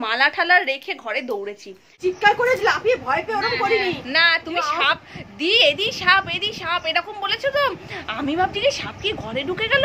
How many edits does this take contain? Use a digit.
1